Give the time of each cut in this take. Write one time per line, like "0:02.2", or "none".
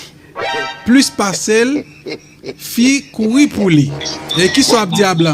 0:04.3